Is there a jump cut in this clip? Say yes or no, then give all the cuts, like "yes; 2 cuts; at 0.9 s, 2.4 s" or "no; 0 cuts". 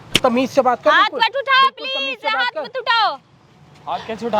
no; 0 cuts